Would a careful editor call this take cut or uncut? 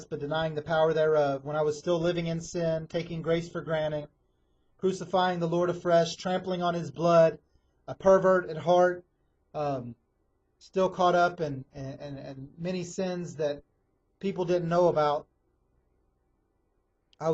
cut